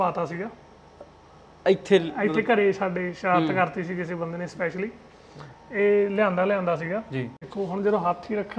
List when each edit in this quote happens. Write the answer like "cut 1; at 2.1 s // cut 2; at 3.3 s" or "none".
cut 1; at 7.4 s